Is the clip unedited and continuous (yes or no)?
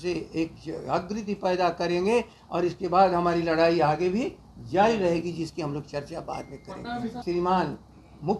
no